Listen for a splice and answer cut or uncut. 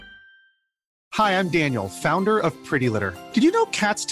uncut